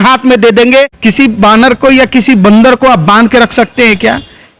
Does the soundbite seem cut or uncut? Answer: cut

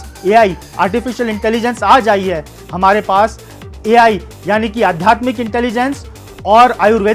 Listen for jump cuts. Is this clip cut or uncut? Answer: uncut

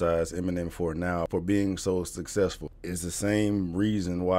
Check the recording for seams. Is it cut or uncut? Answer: cut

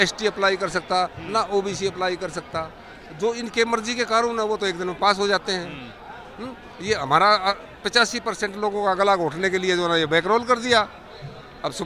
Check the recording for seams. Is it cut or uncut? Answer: uncut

